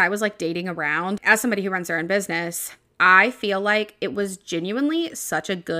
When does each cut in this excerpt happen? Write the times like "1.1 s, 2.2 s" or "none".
1.2 s